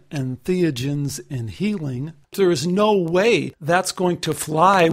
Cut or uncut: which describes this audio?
cut